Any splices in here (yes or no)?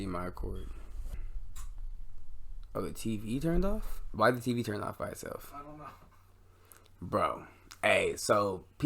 yes